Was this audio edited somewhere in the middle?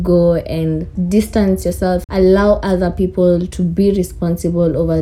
yes; 1 cut; at 2.1 s

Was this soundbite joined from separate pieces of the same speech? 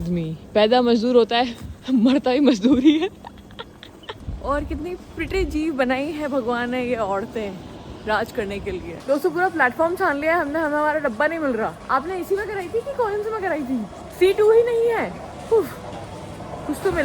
no; 0 cuts

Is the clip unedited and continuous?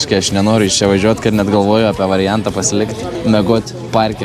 no; 1 cut; at 3.1 s

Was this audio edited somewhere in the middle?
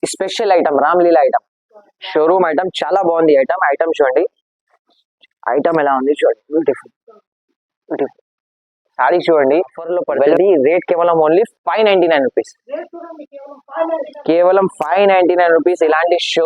yes; 1 cut; at 10.3 s

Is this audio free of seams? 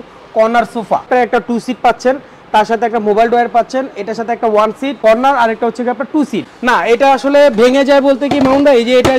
no; 3 cuts; at 1.1 s, 5.0 s, 6.5 s

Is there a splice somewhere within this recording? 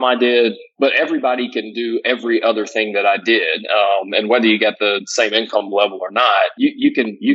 no; 0 cuts

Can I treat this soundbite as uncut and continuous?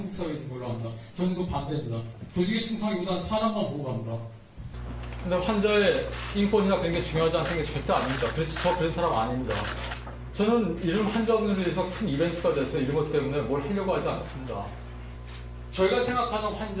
no; 1 cut; at 2.5 s

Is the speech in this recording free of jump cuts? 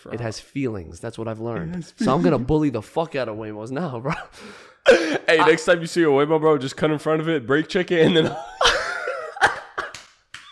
yes; 0 cuts

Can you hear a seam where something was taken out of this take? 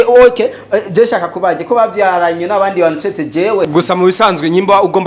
yes; 1 cut; at 3.7 s

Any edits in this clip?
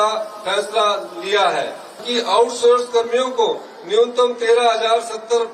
yes; 1 cut; at 2.0 s

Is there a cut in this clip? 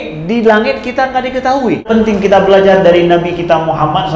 yes; 1 cut; at 1.9 s

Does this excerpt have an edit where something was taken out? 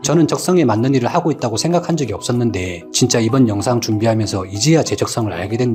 no; 0 cuts

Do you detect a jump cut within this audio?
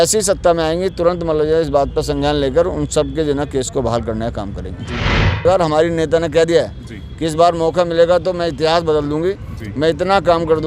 yes; 1 cut; at 5.4 s

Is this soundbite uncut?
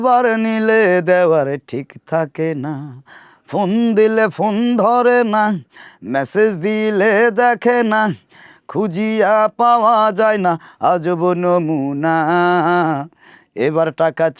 yes; 0 cuts

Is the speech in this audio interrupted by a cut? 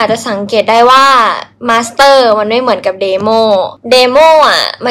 yes; 1 cut; at 3.8 s

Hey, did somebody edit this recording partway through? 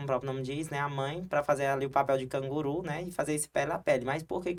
no; 0 cuts

